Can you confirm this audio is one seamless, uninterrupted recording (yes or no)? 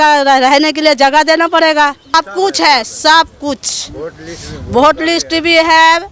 no